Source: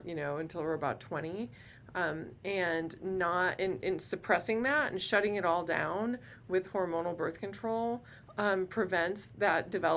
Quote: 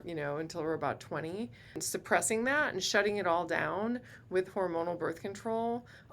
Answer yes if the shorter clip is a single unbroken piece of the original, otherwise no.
no